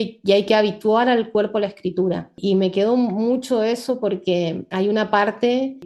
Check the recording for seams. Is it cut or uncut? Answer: uncut